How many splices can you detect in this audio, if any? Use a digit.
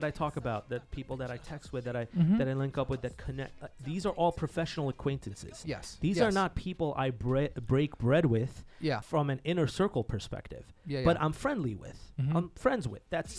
1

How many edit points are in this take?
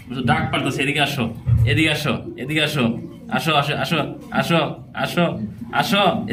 0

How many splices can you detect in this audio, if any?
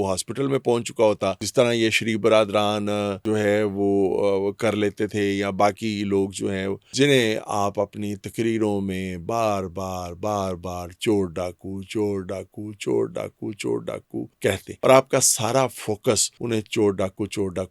5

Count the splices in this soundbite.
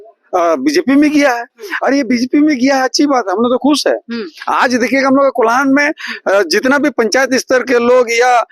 0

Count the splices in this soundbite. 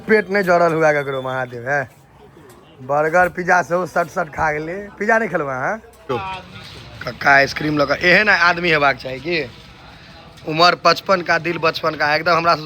1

